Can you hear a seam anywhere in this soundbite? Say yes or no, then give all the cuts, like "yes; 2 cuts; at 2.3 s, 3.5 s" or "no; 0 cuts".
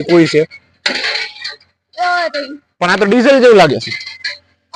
no; 0 cuts